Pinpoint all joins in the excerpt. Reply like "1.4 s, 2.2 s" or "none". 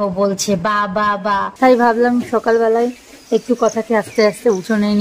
1.5 s